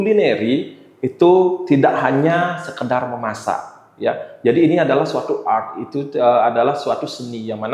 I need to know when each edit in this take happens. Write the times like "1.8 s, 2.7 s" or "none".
none